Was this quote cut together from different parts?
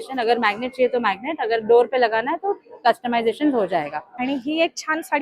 yes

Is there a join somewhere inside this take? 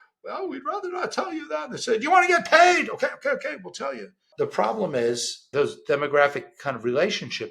yes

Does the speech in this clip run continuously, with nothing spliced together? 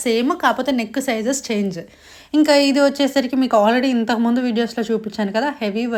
yes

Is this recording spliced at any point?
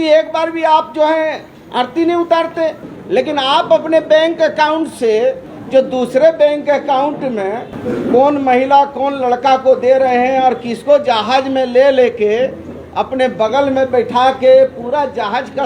yes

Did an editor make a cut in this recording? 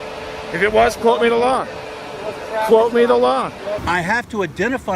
yes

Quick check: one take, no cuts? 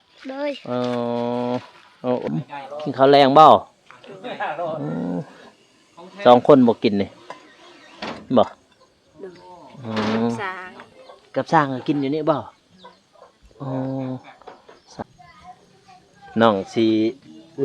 no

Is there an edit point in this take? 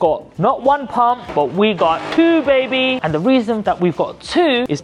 no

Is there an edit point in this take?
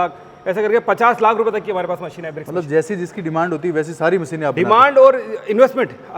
no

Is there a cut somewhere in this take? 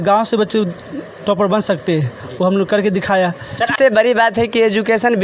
yes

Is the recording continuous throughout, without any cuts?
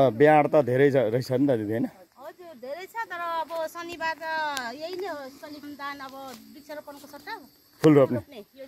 yes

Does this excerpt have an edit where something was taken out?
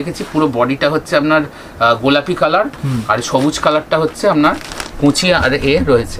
no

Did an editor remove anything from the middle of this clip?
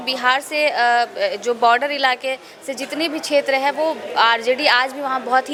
no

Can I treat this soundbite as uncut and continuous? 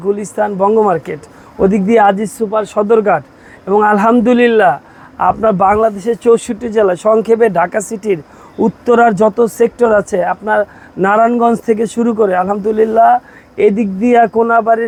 yes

